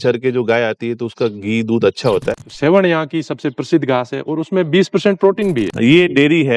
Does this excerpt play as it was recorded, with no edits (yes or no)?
no